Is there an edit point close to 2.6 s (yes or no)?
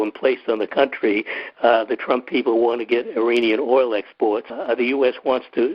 no